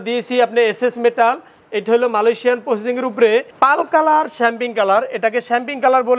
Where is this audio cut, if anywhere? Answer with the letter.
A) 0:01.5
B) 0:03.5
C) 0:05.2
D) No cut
B